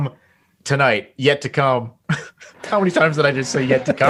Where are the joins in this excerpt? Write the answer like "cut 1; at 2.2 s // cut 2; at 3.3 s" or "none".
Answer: none

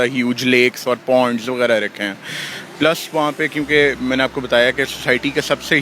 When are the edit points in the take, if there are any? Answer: none

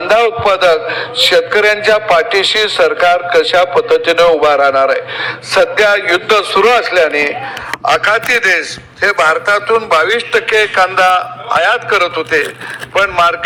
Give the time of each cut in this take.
none

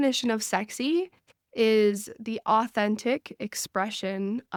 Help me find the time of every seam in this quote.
none

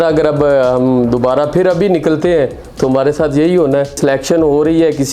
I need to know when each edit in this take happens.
cut 1; at 4.0 s

